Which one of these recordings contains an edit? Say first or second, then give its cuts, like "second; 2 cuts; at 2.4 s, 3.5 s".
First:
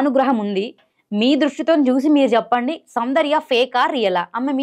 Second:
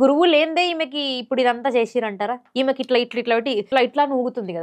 second; 1 cut; at 3.6 s